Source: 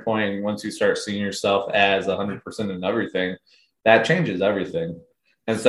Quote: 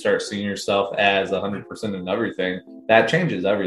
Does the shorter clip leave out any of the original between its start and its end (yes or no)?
yes